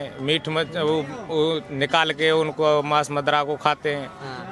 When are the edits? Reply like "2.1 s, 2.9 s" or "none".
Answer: none